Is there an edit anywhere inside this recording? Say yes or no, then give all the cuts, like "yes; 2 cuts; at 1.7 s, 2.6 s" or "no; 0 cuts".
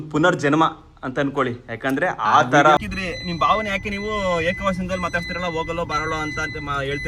yes; 1 cut; at 2.8 s